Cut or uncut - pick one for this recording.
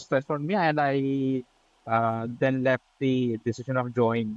uncut